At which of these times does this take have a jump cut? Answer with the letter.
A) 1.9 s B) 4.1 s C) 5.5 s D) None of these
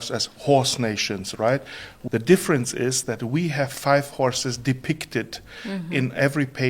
A